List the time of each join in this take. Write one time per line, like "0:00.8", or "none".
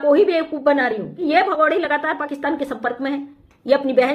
0:01.2